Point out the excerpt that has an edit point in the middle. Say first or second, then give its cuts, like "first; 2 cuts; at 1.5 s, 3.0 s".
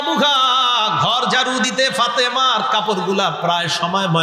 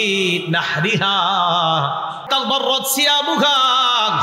second; 1 cut; at 2.2 s